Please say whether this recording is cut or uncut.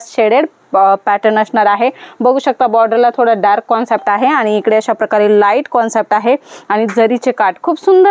uncut